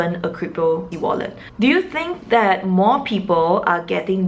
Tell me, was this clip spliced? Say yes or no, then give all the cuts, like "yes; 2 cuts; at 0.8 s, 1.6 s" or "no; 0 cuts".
yes; 1 cut; at 1.4 s